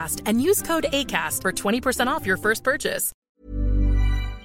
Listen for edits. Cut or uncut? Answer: cut